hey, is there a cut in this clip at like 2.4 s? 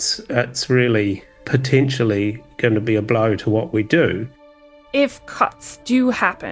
no; 1 cut; at 4.3 s

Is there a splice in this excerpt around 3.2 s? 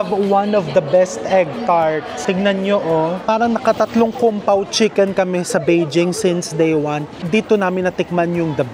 yes; 3 cuts; at 2.1 s, 3.2 s, 7.1 s

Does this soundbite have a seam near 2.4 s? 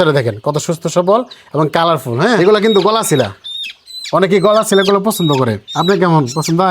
yes; 1 cut; at 2.4 s

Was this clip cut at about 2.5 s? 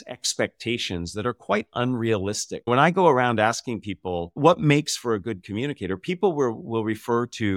yes; 1 cut; at 2.5 s

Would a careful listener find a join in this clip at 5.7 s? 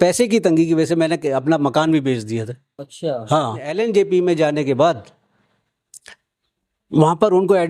no; 1 cut; at 3.7 s

